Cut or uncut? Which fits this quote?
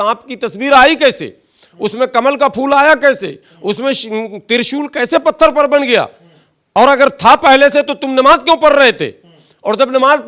uncut